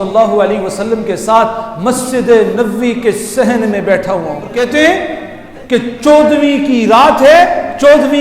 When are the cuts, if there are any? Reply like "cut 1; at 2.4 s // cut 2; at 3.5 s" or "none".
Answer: cut 1; at 4.5 s